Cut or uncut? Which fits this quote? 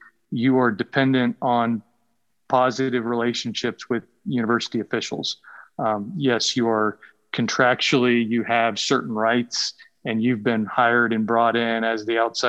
uncut